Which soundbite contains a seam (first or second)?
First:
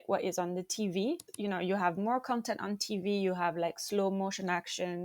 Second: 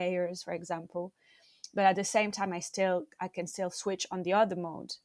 first